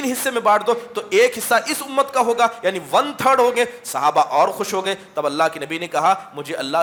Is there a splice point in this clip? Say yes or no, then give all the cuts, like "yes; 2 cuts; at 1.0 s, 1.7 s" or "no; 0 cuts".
no; 0 cuts